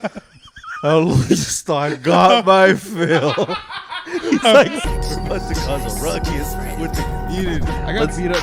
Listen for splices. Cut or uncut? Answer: cut